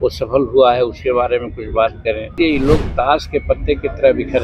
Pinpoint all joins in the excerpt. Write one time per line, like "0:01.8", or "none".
0:02.3